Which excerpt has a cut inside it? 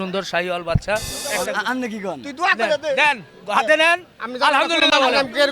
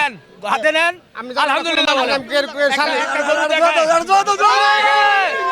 first; 1 cut; at 1.2 s

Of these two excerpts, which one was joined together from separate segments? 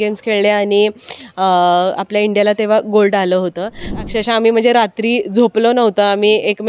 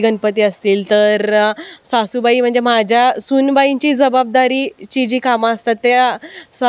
first; 1 cut; at 4.0 s

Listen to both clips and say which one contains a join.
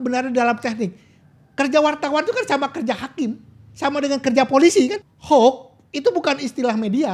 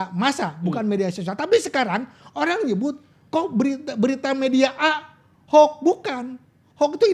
first; 1 cut; at 5.1 s

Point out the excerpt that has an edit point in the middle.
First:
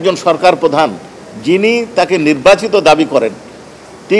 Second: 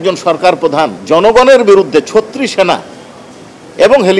second; 1 cut; at 1.0 s

